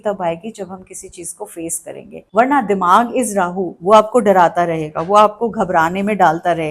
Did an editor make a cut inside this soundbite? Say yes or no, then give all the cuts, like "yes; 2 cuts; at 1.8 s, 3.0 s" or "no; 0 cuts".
no; 0 cuts